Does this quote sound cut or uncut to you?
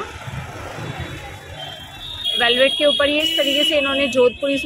uncut